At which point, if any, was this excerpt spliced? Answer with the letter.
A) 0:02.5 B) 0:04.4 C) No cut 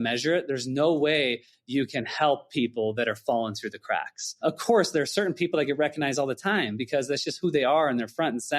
B